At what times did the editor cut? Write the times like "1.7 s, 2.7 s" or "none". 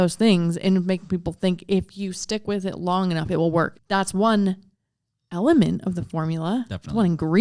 3.7 s

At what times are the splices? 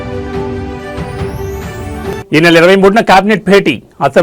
1.7 s

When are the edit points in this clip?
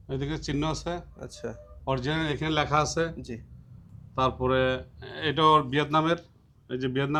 none

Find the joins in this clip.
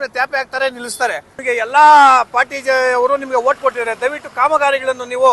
1.3 s

